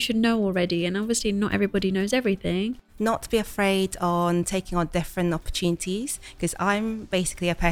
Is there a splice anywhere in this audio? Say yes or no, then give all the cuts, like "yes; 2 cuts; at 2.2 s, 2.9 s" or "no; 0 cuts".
yes; 1 cut; at 2.8 s